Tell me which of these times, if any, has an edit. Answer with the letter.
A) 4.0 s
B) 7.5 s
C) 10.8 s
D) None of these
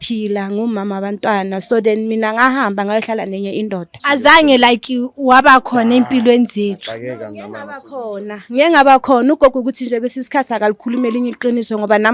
A